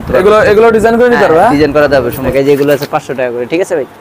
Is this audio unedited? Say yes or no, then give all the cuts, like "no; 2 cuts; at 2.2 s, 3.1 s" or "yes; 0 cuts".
no; 1 cut; at 2.3 s